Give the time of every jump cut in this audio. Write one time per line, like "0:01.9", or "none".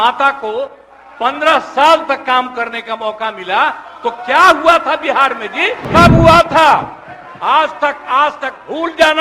0:05.8